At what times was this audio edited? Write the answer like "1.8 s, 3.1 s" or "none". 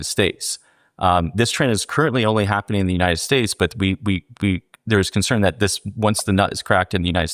none